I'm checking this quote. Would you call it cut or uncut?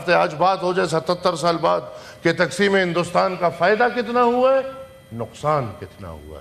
uncut